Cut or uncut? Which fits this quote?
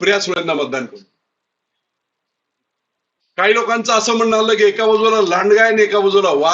uncut